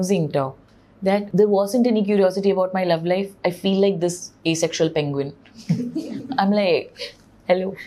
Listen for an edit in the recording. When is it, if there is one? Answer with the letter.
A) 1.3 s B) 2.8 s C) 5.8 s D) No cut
A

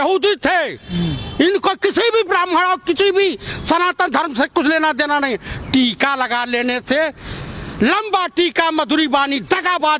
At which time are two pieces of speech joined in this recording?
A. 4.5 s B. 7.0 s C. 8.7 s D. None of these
D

